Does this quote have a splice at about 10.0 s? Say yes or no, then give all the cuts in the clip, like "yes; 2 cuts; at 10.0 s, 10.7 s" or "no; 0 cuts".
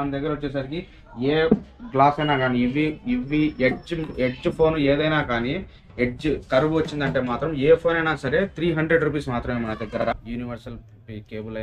yes; 1 cut; at 10.0 s